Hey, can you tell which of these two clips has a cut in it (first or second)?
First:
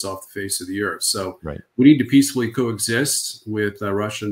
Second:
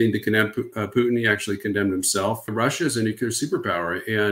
second